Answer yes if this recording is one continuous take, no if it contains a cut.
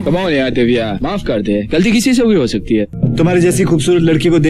yes